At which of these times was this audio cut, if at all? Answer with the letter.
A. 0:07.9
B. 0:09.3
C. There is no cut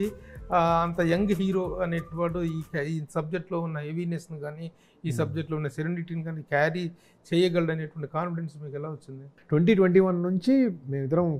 B